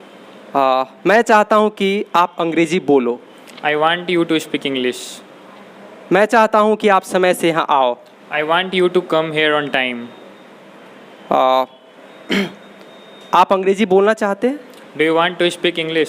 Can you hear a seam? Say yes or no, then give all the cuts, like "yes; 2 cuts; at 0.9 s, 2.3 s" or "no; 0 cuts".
no; 0 cuts